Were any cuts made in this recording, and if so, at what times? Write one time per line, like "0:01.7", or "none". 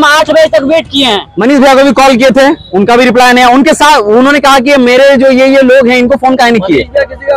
0:01.3